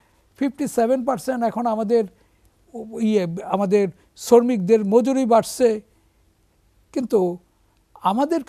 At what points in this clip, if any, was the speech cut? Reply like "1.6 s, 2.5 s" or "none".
none